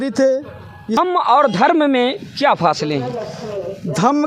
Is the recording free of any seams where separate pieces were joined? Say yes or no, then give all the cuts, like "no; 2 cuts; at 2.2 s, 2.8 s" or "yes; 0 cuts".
no; 1 cut; at 1.0 s